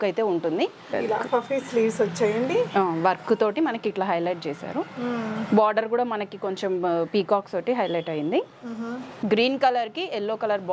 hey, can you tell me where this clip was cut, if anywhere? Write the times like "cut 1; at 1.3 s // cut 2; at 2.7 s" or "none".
cut 1; at 0.9 s // cut 2; at 9.2 s